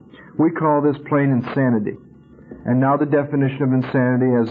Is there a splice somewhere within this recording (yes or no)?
no